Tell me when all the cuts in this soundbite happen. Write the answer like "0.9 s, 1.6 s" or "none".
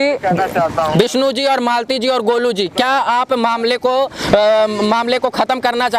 none